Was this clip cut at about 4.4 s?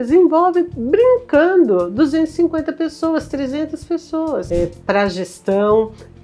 yes; 1 cut; at 4.4 s

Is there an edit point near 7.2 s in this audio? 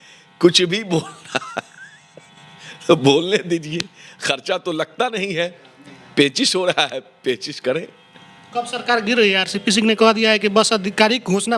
no; 0 cuts

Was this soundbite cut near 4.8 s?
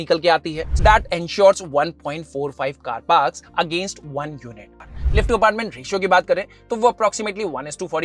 yes; 2 cuts; at 0.8 s, 4.8 s

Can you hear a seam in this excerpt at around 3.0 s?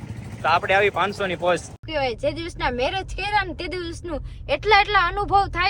no; 1 cut; at 1.8 s

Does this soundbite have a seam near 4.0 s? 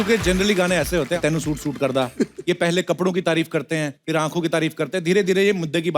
yes; 2 cuts; at 1.2 s, 4.0 s

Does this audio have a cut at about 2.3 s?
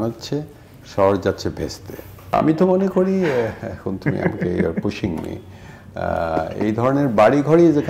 yes; 1 cut; at 2.3 s

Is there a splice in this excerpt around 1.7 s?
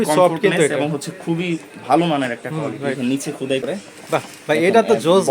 no; 1 cut; at 3.6 s

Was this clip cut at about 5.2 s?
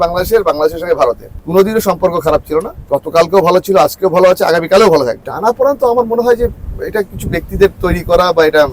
yes; 3 cuts; at 1.3 s, 2.8 s, 5.2 s

